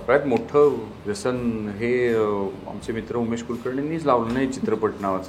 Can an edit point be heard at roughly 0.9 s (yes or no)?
yes